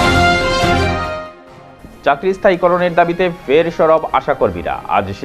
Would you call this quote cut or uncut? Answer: uncut